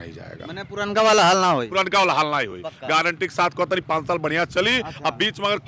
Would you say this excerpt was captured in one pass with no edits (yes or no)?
yes